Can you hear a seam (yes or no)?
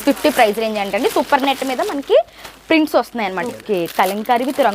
yes